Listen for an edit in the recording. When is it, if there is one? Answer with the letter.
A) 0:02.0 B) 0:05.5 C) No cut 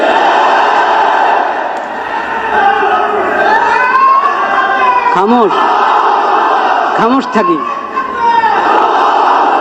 C